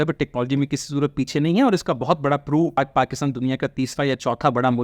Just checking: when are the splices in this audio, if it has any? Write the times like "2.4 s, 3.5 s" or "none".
2.8 s